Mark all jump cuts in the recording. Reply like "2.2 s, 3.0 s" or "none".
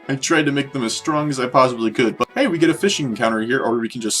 2.2 s